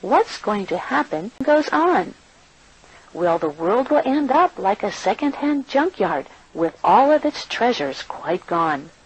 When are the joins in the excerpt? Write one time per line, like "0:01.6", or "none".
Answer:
0:01.4